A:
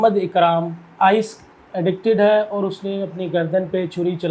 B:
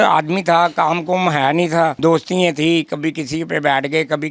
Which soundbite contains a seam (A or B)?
B